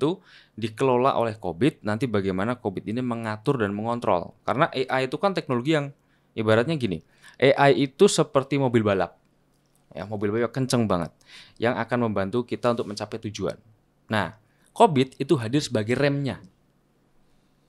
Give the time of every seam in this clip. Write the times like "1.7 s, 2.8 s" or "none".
none